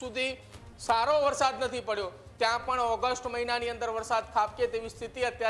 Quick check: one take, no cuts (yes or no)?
yes